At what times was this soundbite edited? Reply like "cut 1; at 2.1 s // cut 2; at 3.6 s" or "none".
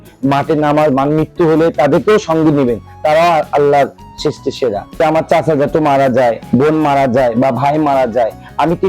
cut 1; at 4.8 s